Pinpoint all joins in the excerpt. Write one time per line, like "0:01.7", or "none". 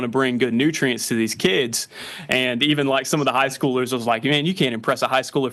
none